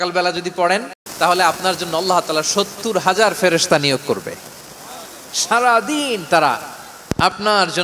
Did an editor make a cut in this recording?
yes; 1 cut; at 0.9 s

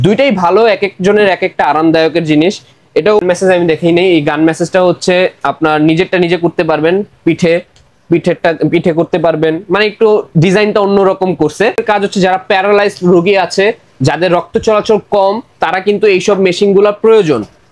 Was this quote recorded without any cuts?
no; 2 cuts; at 3.2 s, 11.8 s

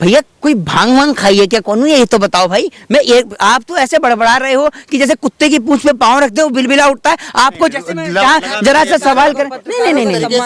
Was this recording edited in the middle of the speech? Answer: no; 0 cuts

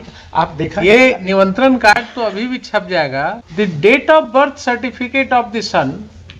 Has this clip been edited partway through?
yes; 1 cut; at 3.4 s

